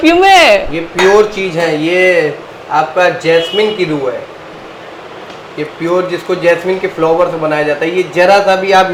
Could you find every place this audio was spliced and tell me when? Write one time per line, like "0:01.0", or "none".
none